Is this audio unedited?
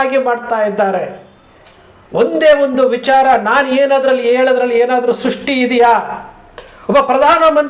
yes; 0 cuts

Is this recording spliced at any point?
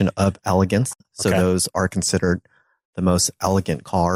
no; 0 cuts

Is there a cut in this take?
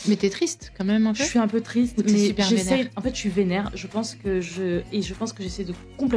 no; 0 cuts

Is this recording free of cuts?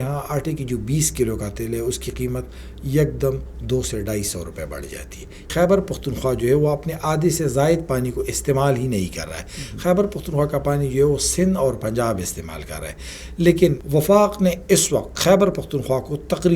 no; 2 cuts; at 5.5 s, 13.8 s

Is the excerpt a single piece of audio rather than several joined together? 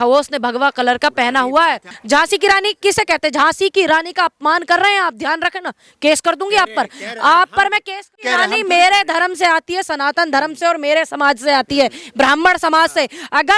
no; 2 cuts; at 1.9 s, 8.2 s

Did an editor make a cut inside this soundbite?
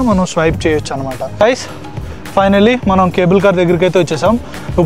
yes; 1 cut; at 1.2 s

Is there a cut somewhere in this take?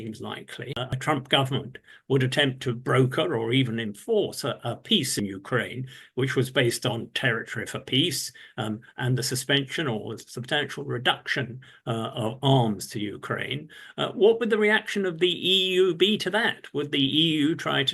yes; 2 cuts; at 0.9 s, 5.1 s

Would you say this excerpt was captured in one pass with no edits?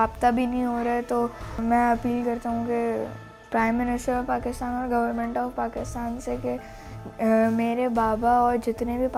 yes; 0 cuts

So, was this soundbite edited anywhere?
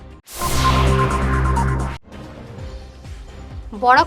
yes; 1 cut; at 2.0 s

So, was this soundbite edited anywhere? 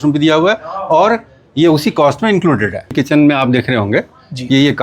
yes; 1 cut; at 2.9 s

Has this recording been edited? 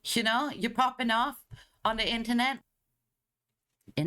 yes; 1 cut; at 2.6 s

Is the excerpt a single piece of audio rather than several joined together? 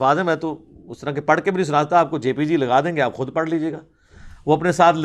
yes; 0 cuts

